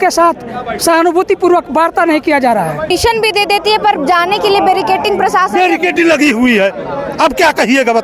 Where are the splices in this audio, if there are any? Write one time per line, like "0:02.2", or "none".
0:02.9